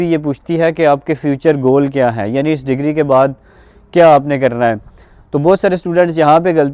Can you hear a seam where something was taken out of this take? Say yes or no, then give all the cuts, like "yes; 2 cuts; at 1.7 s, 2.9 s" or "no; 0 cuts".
no; 0 cuts